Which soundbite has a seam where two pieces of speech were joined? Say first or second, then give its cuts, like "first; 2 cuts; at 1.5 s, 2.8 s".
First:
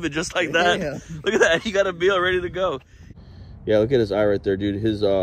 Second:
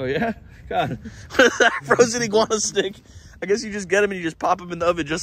first; 1 cut; at 3.3 s